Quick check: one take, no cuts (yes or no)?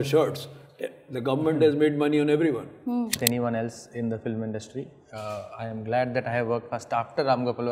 no